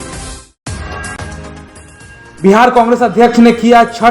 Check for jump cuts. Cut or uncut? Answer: cut